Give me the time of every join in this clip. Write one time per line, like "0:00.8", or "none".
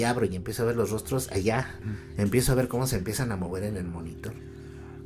0:01.8